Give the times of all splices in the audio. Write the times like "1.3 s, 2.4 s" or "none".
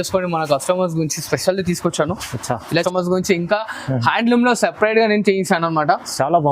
2.9 s